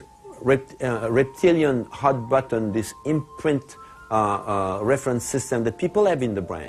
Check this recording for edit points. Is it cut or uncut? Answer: cut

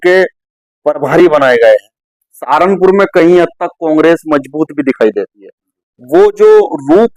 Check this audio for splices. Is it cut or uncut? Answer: uncut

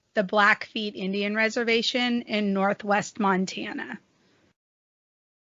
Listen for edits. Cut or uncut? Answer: uncut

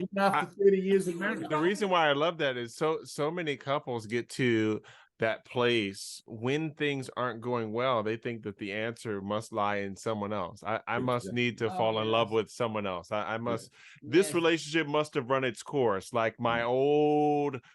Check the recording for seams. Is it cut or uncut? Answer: cut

